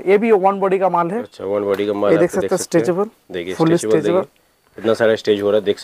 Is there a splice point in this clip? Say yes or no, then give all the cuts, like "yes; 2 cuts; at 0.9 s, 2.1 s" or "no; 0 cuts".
no; 0 cuts